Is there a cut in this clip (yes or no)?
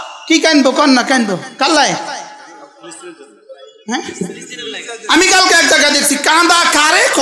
no